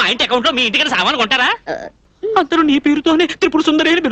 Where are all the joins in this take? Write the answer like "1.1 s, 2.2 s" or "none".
2.1 s